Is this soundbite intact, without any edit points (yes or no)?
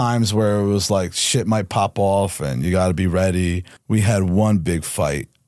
no